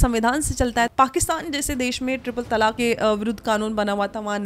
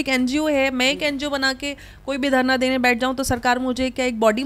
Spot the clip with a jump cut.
first; 2 cuts; at 0.9 s, 2.8 s

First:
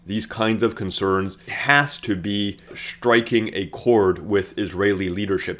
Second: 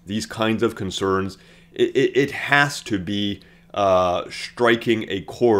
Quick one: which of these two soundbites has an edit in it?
first; 2 cuts; at 1.5 s, 2.8 s

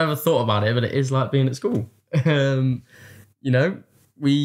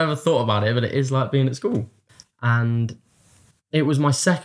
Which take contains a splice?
second; 1 cut; at 2.0 s

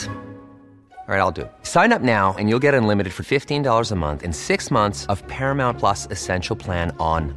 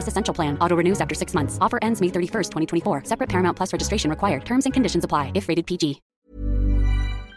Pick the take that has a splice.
second; 1 cut; at 6.1 s

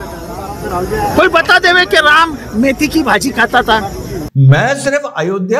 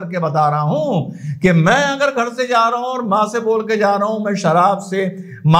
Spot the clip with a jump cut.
first; 1 cut; at 4.1 s

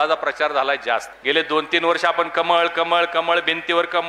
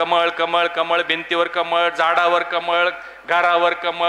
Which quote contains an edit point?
first; 1 cut; at 1.1 s

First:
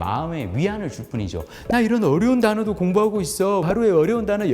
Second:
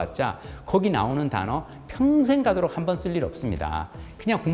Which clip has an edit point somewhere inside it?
first; 1 cut; at 3.6 s

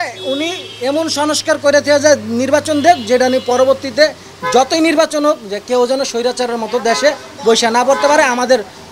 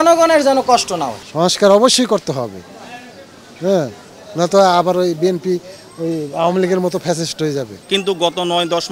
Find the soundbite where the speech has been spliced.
second; 2 cuts; at 1.2 s, 7.8 s

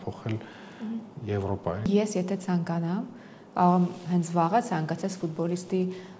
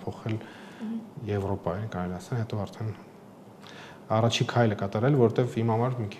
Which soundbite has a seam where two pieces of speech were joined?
first; 1 cut; at 1.9 s

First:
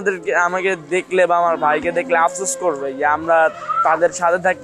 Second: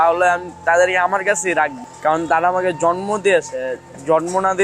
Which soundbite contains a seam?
second; 1 cut; at 1.8 s

